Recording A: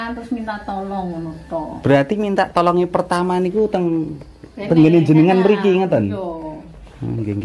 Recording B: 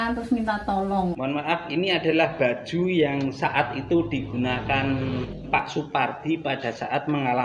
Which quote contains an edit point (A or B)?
B